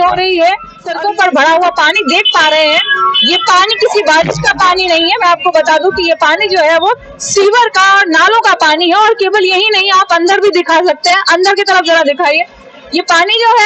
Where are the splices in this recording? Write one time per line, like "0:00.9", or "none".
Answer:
0:00.9